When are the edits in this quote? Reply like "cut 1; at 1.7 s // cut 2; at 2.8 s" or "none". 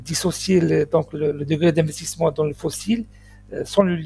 none